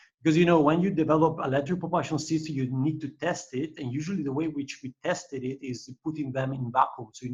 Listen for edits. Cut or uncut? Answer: uncut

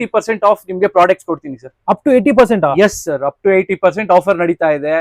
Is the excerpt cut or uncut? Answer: uncut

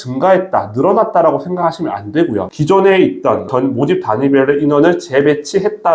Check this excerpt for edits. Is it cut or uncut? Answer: cut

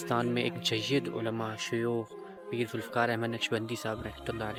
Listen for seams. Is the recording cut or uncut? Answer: uncut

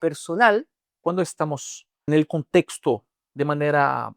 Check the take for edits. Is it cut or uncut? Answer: cut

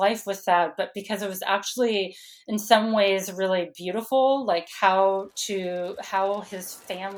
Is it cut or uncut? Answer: uncut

